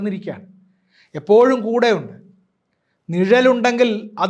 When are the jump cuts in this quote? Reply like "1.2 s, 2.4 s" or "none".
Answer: none